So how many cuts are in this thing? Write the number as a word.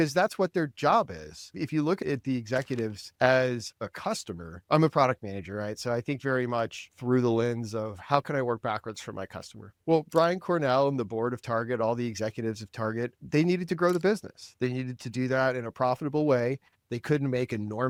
zero